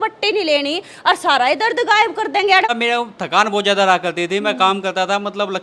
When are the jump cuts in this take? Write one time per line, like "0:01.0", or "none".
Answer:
0:02.7